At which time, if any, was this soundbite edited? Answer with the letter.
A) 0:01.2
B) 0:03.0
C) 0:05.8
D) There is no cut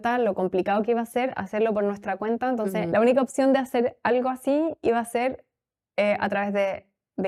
D